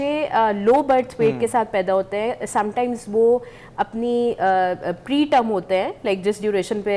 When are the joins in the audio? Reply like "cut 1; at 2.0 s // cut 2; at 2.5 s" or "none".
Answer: none